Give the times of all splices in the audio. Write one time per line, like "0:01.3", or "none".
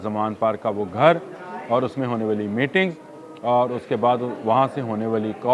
none